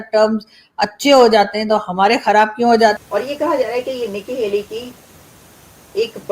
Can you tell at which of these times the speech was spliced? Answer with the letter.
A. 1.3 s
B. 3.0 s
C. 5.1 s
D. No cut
B